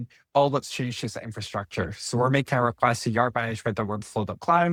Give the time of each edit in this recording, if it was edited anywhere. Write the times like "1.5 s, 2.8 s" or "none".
none